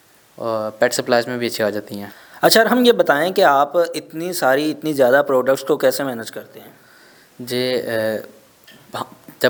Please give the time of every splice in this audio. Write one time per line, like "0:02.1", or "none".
none